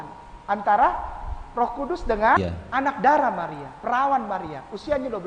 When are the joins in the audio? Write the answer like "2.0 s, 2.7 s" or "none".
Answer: 2.4 s